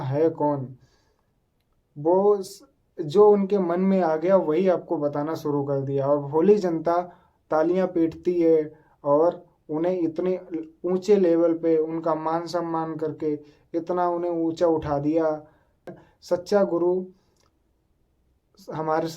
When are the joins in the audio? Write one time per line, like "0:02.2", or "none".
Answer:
0:15.9